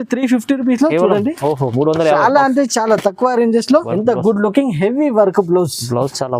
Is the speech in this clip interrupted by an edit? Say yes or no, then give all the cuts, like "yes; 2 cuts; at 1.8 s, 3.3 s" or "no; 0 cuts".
yes; 1 cut; at 3.9 s